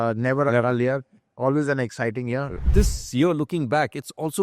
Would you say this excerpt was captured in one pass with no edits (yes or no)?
no